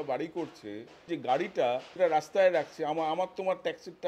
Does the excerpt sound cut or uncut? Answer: cut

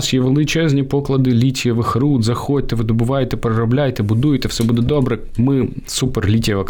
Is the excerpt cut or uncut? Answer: uncut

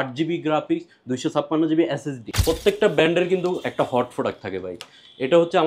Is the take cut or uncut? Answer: cut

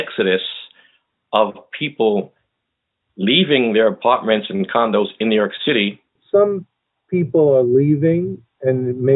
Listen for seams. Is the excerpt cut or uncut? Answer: cut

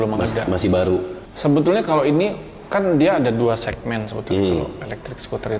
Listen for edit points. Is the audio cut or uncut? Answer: cut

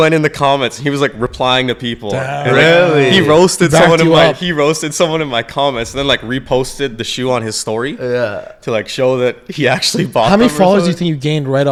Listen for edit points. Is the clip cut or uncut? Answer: uncut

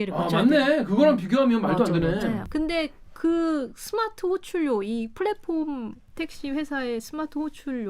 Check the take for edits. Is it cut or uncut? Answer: cut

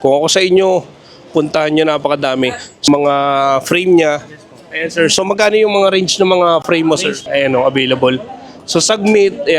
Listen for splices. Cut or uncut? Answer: cut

